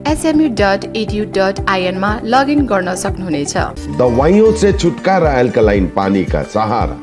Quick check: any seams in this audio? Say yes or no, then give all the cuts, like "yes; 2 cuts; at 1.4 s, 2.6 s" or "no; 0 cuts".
yes; 1 cut; at 3.8 s